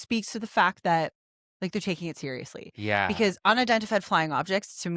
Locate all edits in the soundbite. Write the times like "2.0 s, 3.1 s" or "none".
none